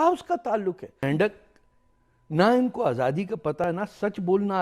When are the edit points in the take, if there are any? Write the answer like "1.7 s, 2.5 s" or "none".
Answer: 1.0 s, 3.6 s